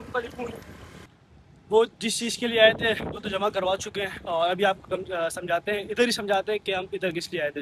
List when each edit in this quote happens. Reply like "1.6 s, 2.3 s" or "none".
1.0 s